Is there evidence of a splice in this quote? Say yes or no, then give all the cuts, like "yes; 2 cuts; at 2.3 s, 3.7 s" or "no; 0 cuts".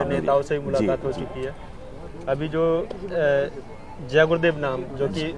no; 0 cuts